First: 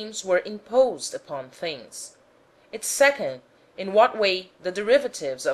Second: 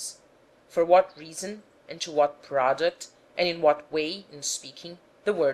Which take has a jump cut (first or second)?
first